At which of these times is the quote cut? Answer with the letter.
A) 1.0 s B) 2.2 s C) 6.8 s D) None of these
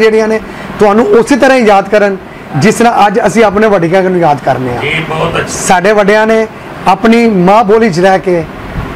D